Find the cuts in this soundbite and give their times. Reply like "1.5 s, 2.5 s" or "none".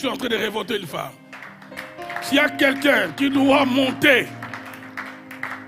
none